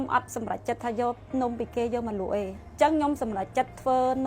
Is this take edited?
yes; 1 cut; at 2.5 s

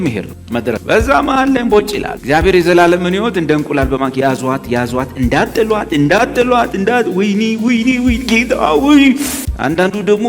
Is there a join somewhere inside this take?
no; 0 cuts

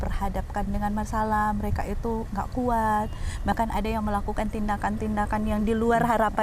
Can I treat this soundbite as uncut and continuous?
yes; 0 cuts

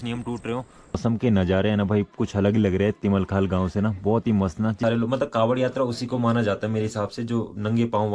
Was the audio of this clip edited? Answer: yes; 2 cuts; at 1.0 s, 4.8 s

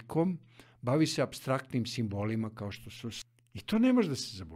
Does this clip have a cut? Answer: yes; 1 cut; at 3.2 s

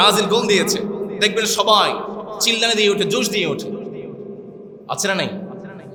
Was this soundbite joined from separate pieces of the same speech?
no; 0 cuts

